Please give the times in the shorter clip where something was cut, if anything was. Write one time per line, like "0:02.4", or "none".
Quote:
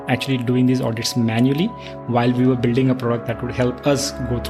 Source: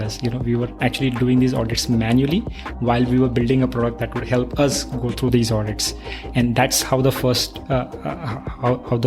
none